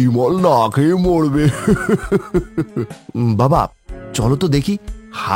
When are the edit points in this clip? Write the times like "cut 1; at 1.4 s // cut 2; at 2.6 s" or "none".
cut 1; at 3.0 s

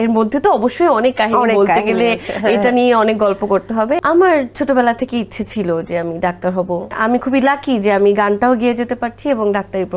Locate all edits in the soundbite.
cut 1; at 4.0 s // cut 2; at 7.0 s

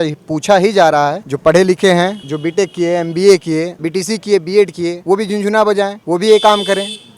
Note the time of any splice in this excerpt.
cut 1; at 1.3 s // cut 2; at 2.3 s // cut 3; at 3.8 s // cut 4; at 5.0 s // cut 5; at 6.0 s

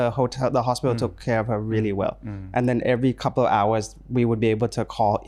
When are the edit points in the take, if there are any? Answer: none

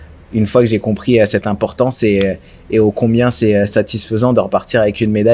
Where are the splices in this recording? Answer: none

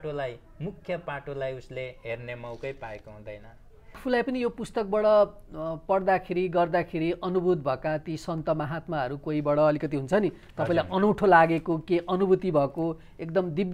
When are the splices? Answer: cut 1; at 4.0 s

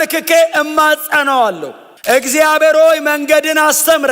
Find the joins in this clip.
none

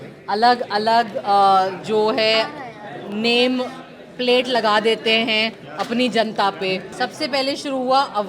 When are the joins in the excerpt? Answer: cut 1; at 6.9 s

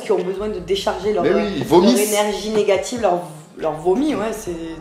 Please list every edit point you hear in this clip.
none

